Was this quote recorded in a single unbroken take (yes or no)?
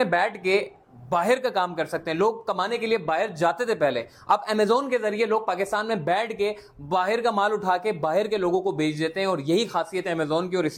yes